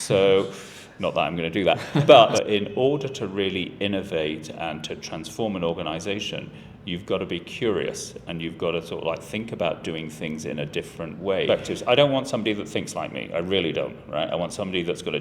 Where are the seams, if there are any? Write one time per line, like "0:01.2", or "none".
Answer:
0:02.3
0:11.5